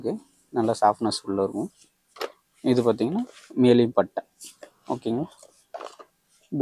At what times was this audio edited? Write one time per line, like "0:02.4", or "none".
none